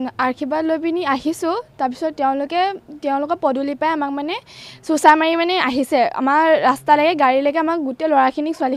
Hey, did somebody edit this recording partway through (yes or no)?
no